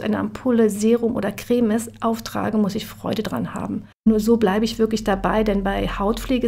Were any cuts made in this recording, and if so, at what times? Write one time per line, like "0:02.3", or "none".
0:04.1

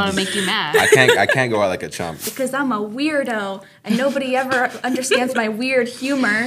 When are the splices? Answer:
0:02.2

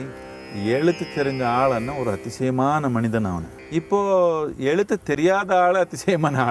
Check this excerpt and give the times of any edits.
0:03.5

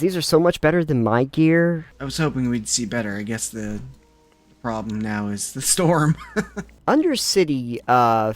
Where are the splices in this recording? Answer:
0:01.9
0:06.6

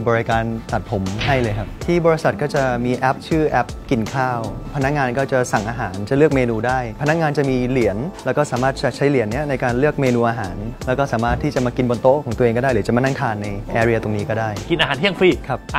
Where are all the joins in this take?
none

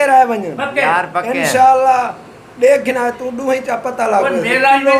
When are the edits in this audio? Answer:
none

